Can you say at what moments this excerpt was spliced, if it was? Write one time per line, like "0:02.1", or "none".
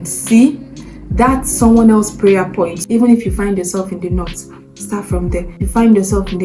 0:02.8
0:05.5